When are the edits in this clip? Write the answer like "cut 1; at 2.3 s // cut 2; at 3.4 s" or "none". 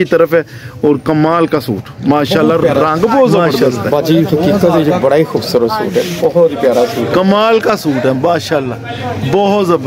cut 1; at 3.5 s